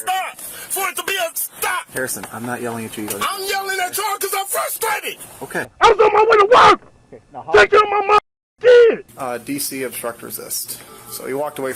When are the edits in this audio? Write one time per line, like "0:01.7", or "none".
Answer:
0:09.1